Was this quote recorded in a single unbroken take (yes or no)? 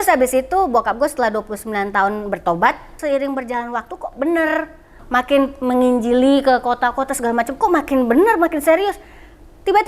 no